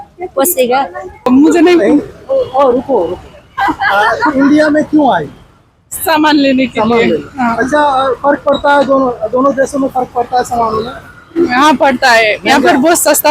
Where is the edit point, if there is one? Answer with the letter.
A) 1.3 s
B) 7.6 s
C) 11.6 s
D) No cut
A